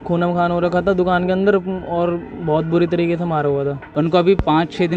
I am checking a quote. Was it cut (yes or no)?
yes